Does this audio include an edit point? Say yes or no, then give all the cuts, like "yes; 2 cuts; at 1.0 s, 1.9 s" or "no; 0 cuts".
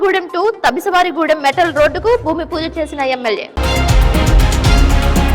yes; 1 cut; at 3.5 s